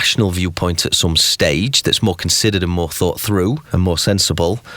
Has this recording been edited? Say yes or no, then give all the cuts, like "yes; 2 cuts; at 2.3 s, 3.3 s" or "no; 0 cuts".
yes; 1 cut; at 3.6 s